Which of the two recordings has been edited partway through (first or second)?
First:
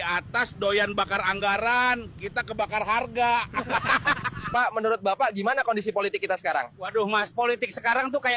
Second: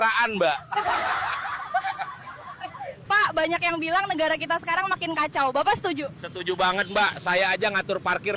second